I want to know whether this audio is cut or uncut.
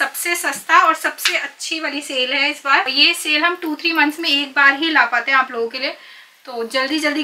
uncut